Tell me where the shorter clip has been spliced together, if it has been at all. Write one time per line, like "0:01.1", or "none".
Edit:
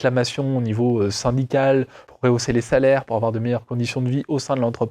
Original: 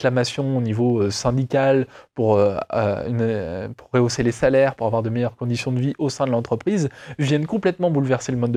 0:02.0